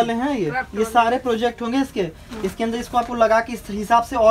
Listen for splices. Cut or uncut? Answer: uncut